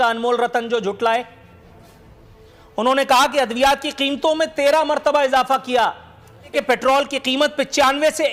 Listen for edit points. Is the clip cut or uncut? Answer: uncut